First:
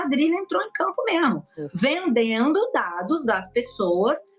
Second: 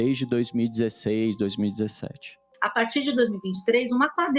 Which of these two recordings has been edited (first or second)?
second